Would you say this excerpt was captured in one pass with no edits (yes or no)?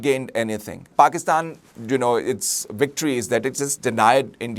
no